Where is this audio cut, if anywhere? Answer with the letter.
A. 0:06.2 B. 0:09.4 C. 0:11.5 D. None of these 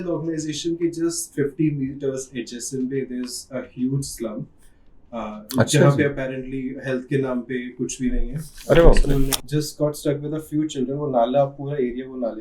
B